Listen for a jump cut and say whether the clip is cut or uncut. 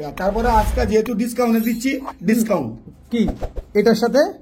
uncut